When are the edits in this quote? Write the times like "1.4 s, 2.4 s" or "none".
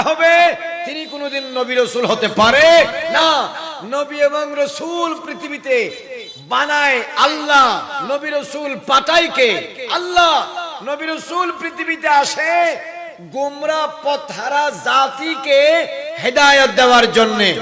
7.9 s